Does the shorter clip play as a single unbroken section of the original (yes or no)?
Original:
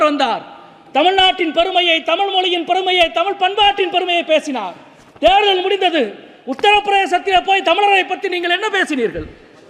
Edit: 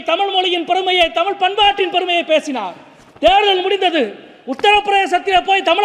yes